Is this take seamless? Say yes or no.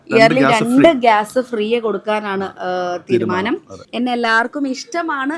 no